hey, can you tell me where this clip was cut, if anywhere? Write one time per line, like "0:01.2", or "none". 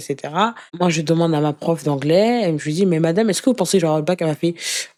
none